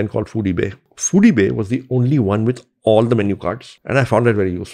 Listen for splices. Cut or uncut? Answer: cut